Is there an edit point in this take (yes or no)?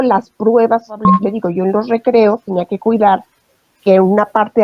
yes